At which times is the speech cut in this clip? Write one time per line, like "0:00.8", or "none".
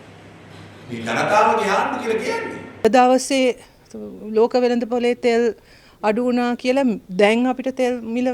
0:02.8